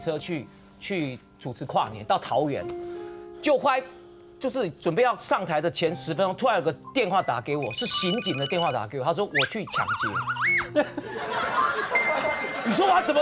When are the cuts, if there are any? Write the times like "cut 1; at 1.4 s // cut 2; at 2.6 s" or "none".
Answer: none